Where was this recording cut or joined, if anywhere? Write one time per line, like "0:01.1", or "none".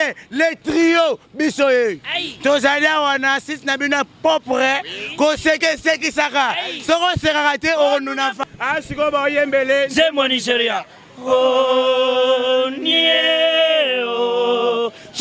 0:08.5